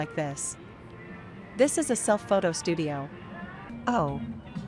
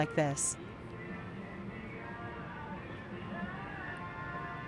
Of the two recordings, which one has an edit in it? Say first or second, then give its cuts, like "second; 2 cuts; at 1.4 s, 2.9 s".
first; 2 cuts; at 1.4 s, 3.1 s